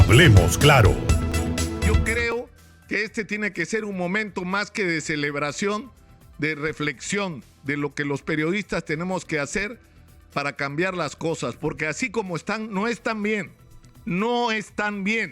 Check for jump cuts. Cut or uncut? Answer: cut